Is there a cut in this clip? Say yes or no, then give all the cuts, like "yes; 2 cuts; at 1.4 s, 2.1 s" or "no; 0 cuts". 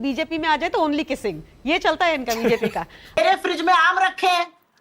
yes; 1 cut; at 3.2 s